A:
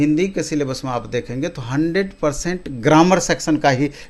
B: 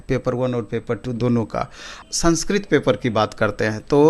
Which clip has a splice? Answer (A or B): B